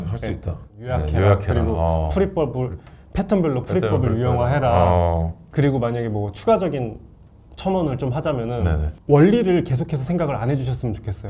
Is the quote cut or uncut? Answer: cut